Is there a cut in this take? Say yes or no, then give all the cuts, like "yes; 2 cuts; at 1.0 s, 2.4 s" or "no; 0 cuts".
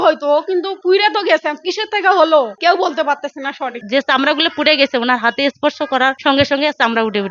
yes; 2 cuts; at 3.7 s, 6.2 s